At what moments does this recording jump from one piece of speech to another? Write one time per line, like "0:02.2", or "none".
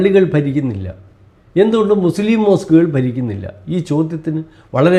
none